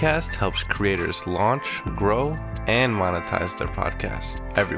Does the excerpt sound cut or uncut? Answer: uncut